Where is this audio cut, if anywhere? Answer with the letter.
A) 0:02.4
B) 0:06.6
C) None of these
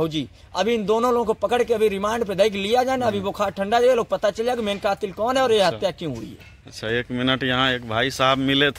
C